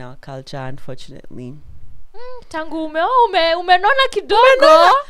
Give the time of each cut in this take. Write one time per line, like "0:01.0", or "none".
none